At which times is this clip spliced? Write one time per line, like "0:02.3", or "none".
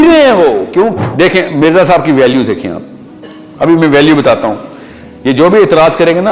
0:01.0